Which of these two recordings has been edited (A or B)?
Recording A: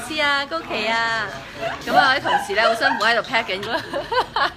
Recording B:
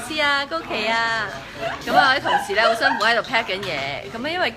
B